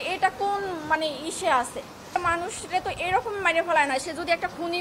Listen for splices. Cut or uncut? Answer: cut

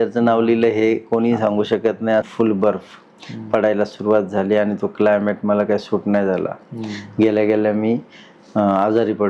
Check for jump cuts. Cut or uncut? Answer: cut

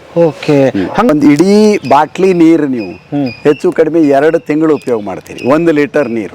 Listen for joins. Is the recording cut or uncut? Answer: cut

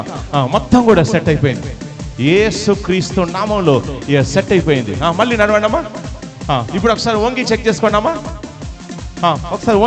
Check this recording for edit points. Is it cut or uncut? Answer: uncut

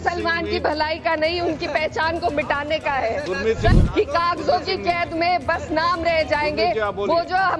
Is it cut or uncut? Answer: cut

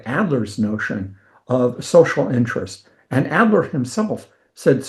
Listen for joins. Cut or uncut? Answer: uncut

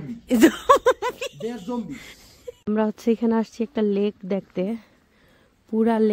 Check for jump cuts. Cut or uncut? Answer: cut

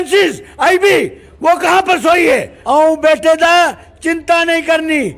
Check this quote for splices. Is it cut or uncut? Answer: cut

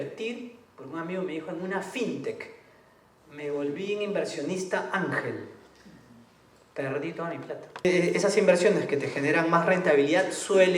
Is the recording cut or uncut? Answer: cut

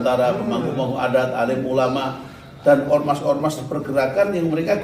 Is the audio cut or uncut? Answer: uncut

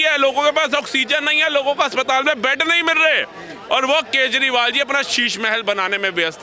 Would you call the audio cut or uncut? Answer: uncut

